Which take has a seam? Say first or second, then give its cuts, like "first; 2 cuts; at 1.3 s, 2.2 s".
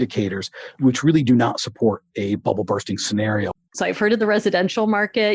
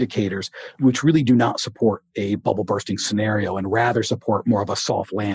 first; 1 cut; at 3.5 s